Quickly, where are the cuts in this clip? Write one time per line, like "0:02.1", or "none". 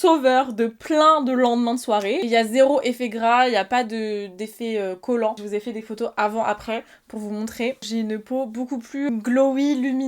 0:02.2
0:05.4
0:07.8
0:09.1